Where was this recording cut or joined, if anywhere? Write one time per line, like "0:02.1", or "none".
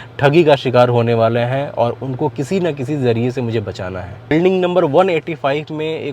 0:04.3